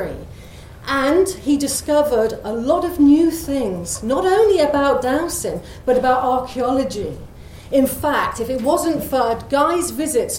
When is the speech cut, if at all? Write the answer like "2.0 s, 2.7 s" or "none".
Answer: none